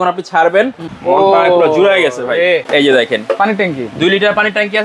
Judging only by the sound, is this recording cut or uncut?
cut